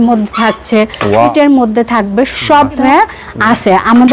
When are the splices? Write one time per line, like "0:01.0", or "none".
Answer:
0:01.3
0:02.8